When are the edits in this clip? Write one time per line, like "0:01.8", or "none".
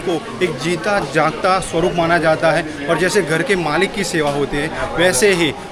none